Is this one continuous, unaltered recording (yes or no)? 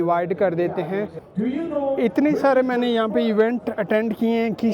no